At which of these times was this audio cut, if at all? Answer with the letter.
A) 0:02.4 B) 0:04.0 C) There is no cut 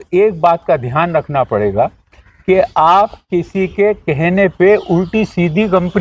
C